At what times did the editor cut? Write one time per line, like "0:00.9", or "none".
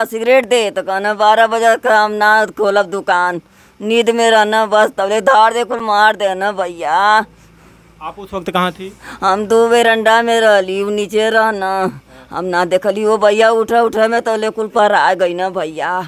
none